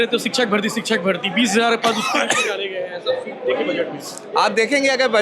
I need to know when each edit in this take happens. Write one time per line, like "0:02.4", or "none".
none